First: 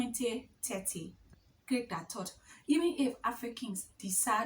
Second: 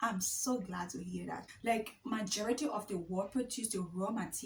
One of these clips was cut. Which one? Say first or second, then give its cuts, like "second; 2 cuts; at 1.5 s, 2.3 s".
first; 1 cut; at 1.1 s